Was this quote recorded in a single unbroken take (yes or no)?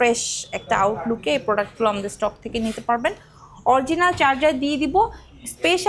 yes